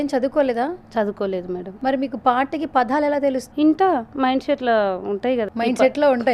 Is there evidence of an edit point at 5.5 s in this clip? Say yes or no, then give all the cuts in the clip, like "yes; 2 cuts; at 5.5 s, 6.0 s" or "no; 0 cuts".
yes; 3 cuts; at 1.7 s, 3.4 s, 5.5 s